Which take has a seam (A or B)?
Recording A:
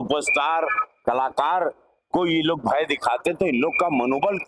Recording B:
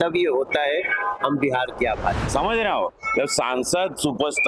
B